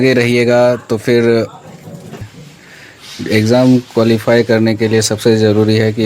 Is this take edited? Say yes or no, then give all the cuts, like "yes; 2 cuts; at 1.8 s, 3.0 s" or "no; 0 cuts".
yes; 1 cut; at 2.1 s